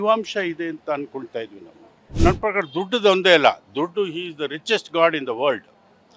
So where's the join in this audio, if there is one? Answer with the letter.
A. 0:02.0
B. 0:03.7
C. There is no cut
A